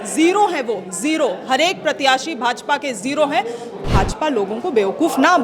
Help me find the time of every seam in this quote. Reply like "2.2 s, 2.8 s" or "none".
3.8 s

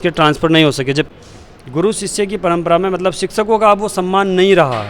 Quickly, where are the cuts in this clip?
1.1 s

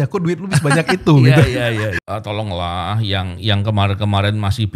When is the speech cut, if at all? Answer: 2.0 s

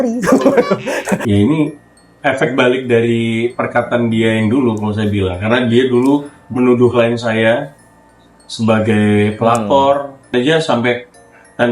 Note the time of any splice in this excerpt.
1.2 s, 10.3 s

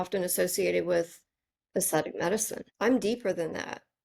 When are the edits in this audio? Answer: 2.6 s

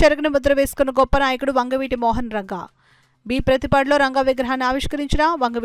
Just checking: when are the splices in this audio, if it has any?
none

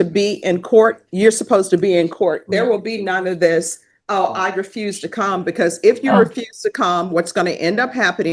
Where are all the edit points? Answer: none

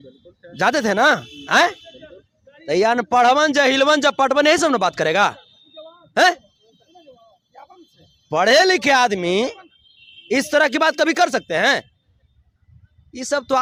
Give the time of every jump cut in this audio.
none

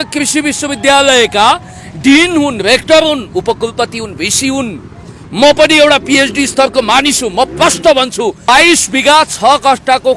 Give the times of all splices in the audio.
8.4 s

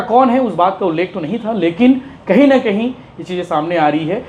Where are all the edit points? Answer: none

